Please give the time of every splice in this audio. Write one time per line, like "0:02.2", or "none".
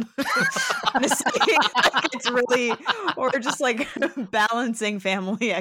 none